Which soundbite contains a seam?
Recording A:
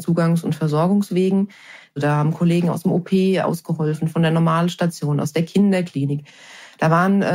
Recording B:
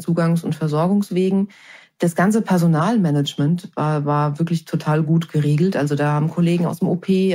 A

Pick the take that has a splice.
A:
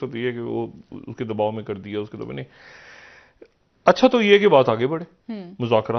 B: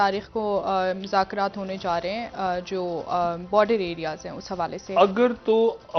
B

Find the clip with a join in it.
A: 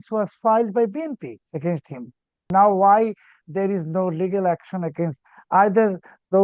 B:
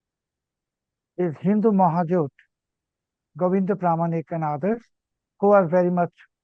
A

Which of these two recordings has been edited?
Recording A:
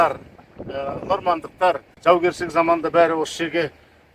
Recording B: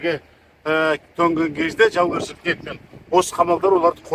A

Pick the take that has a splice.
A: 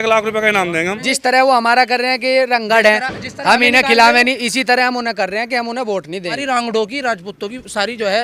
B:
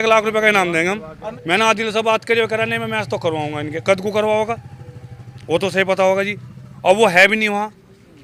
A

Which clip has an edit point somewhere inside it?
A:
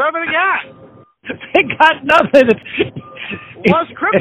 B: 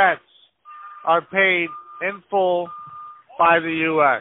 A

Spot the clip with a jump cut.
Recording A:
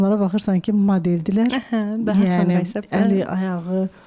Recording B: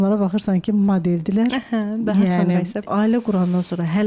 B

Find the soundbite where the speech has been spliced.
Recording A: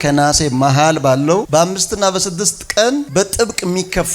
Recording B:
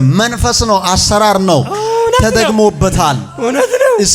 A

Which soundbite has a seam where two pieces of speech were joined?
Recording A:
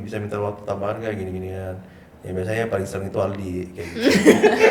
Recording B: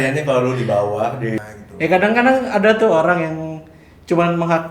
B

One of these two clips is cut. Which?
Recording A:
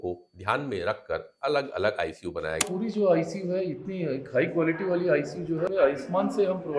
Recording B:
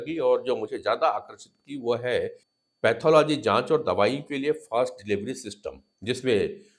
A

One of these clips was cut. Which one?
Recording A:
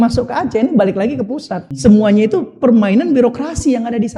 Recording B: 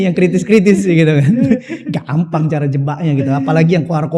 A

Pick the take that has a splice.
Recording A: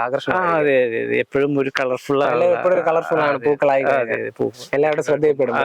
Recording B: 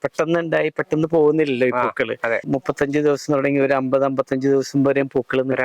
B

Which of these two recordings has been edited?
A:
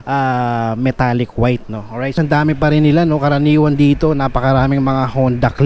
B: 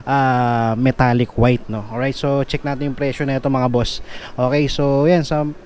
A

